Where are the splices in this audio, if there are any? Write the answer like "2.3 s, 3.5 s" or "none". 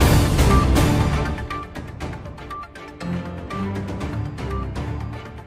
1.1 s

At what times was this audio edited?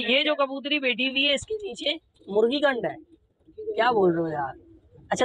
none

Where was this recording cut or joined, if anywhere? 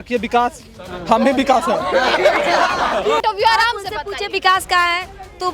3.2 s

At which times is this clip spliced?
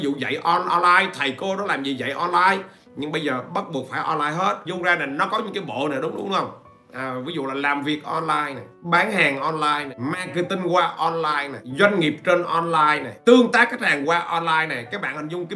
4.6 s, 8.7 s, 9.9 s, 11.6 s, 13.1 s

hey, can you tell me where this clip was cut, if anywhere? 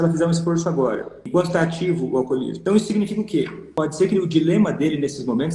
1.2 s, 2.5 s, 3.6 s

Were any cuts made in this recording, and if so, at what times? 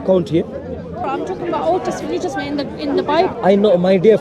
1.1 s

